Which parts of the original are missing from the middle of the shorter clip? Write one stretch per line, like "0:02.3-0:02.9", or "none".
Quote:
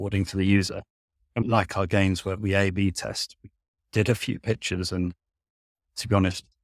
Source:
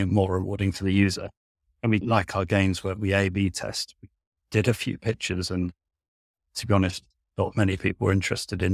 0:01.9-0:02.0